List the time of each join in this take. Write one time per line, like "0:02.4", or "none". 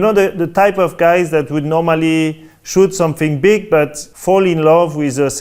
0:04.1